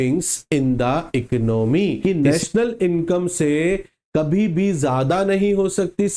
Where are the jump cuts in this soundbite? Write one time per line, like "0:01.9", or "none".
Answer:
0:02.0